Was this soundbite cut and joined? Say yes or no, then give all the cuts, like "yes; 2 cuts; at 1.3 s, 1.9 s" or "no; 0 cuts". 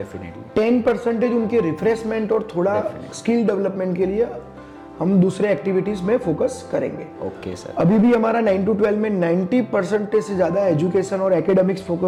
no; 0 cuts